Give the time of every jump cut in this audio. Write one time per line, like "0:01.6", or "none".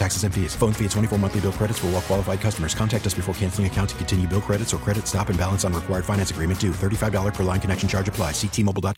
none